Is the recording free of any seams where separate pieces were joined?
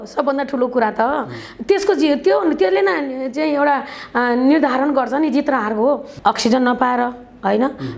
no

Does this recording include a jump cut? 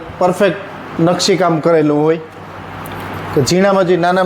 no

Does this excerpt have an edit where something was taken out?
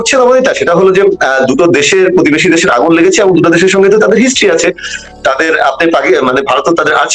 no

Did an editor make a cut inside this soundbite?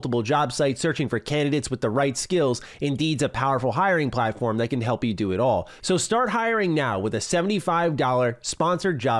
yes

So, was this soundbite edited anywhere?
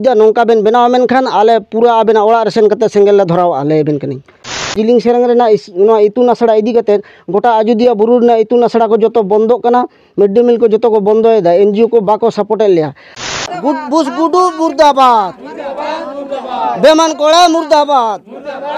yes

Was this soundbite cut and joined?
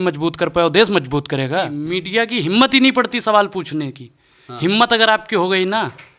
yes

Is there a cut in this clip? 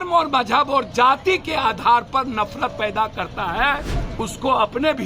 yes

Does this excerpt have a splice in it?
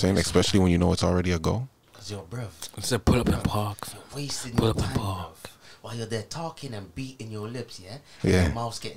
no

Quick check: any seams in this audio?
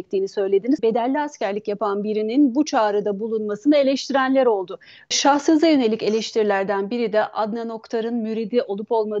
yes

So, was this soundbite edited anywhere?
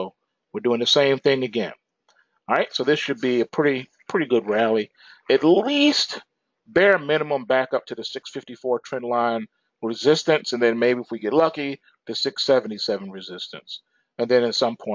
yes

